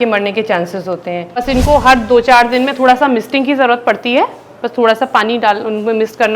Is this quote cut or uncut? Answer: cut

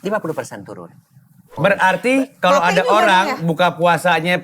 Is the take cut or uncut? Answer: cut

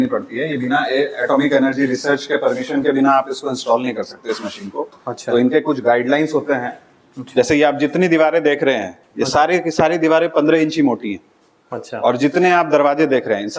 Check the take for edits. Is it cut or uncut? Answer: uncut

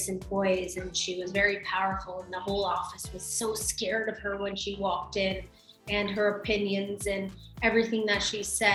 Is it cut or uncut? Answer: uncut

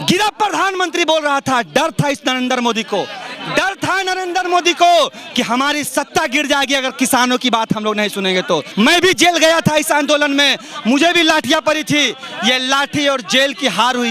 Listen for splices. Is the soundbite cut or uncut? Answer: cut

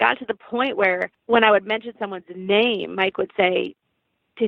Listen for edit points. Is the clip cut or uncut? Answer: cut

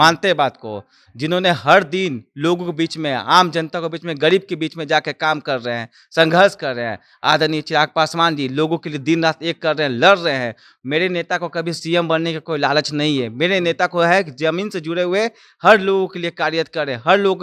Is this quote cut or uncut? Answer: uncut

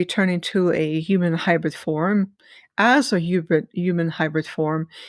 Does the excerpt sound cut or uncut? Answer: uncut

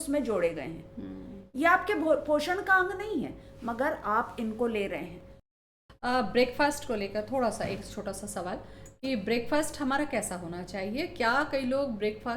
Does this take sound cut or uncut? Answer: cut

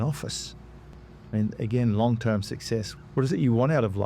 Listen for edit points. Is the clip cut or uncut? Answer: cut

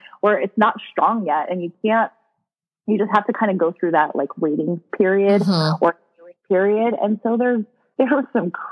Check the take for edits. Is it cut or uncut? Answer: uncut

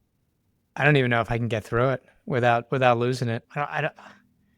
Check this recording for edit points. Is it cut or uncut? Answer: cut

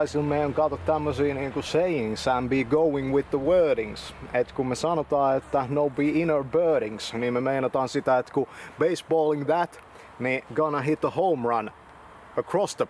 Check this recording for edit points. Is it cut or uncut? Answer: uncut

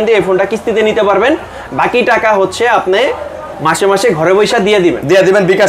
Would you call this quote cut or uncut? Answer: uncut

